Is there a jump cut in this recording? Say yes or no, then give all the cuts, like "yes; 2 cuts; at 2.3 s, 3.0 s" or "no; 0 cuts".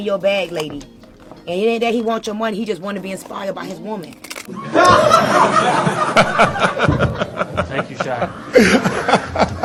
no; 0 cuts